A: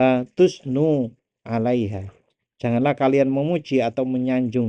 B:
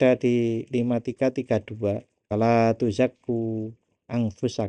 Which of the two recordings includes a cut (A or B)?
B